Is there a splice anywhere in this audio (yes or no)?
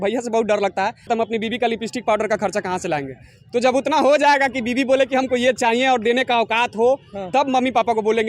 yes